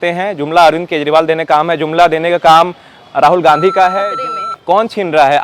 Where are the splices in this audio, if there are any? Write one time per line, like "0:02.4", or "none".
0:04.1

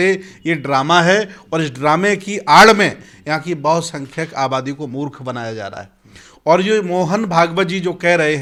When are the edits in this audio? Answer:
none

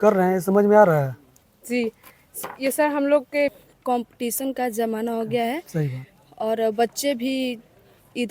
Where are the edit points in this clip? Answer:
0:03.6

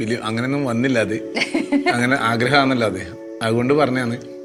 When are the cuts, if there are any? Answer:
none

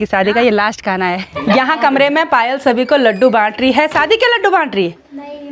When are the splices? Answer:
none

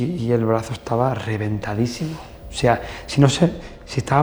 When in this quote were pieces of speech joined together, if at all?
none

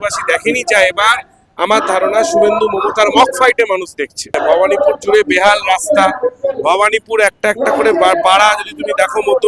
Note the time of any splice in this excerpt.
0:04.4

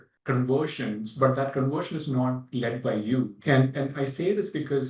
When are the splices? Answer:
0:03.3

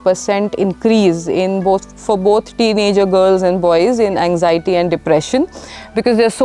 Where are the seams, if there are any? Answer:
none

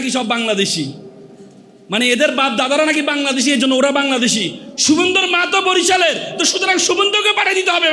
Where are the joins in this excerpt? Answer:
none

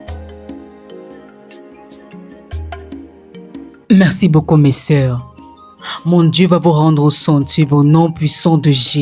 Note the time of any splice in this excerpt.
0:01.0

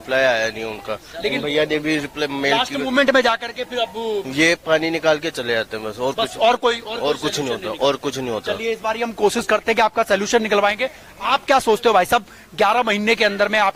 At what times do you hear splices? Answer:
none

